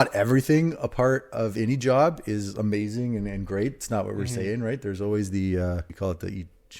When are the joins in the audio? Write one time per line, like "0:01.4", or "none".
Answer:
0:05.9

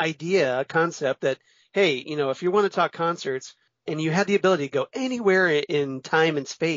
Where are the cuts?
0:03.7

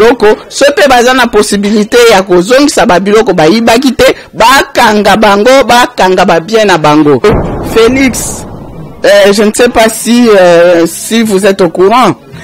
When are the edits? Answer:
0:07.2

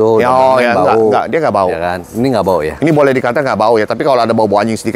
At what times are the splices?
none

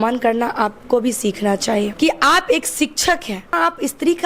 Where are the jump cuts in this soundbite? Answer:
0:01.9
0:03.5

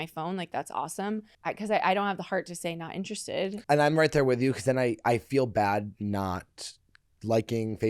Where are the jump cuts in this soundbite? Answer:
0:01.3
0:03.6

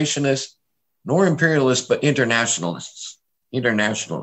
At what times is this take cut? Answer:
none

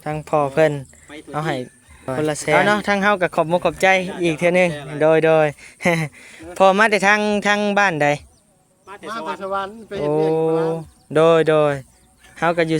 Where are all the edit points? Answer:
0:02.6

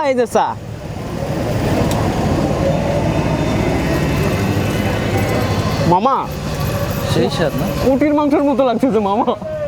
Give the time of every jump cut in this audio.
none

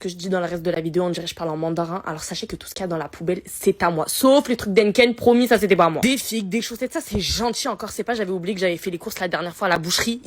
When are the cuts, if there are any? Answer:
0:06.2

